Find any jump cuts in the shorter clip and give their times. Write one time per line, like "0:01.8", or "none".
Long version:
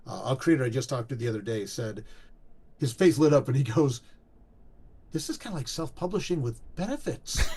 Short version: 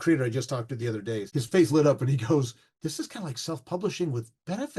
0:01.3
0:02.6